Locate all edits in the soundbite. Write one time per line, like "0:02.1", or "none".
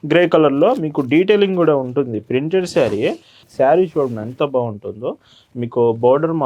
0:03.3